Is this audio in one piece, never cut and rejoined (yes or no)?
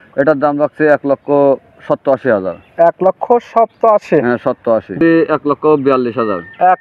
no